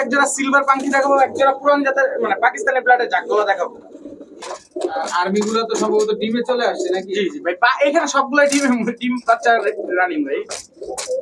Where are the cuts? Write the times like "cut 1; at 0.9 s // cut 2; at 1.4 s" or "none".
cut 1; at 4.3 s